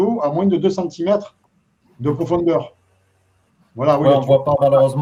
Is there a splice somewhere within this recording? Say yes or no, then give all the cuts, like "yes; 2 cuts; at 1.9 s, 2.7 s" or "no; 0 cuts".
no; 0 cuts